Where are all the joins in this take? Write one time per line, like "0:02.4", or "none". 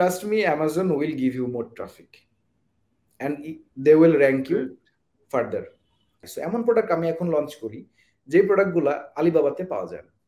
0:06.2